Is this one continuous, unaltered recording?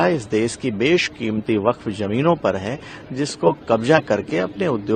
yes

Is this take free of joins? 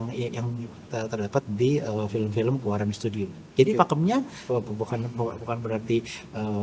no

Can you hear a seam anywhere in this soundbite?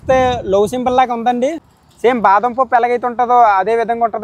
yes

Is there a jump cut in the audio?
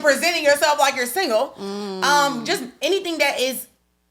no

